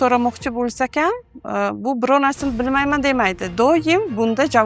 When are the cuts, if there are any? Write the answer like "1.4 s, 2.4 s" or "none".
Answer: none